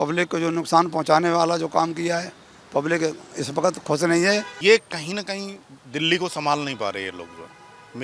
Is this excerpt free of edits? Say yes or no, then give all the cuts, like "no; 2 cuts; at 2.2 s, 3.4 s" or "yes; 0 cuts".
no; 1 cut; at 4.5 s